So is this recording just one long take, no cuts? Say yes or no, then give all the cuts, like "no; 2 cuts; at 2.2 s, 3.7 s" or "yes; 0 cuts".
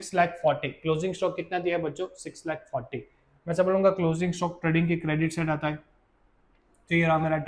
yes; 0 cuts